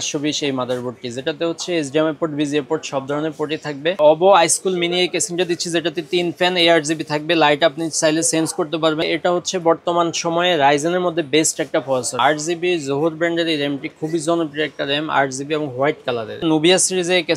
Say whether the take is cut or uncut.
cut